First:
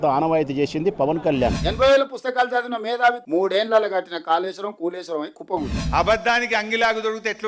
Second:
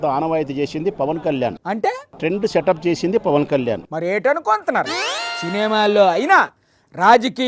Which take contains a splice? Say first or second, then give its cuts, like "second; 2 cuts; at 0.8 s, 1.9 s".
first; 2 cuts; at 1.6 s, 5.9 s